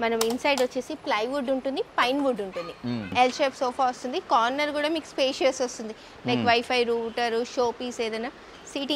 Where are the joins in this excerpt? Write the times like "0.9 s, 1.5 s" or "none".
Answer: 3.1 s